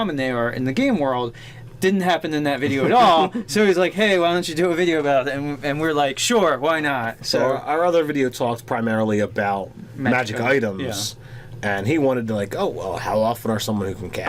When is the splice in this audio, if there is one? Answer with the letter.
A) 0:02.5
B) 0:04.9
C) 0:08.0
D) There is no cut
A